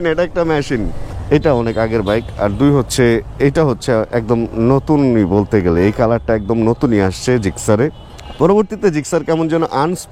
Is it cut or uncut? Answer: cut